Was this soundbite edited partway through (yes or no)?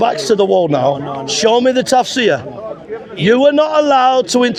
no